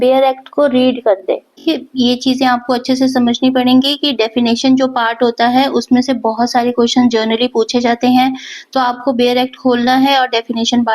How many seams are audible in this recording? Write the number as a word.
one